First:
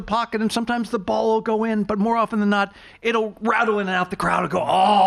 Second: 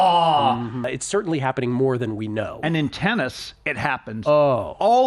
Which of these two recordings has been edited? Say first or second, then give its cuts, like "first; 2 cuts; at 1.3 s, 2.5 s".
second; 1 cut; at 0.9 s